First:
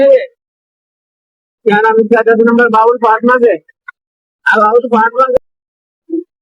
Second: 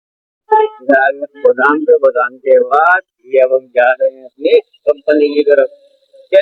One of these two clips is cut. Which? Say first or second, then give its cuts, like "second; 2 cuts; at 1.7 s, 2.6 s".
first; 1 cut; at 5.4 s